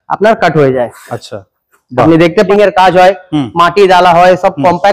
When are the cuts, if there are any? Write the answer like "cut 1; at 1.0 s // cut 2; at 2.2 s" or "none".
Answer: cut 1; at 2.5 s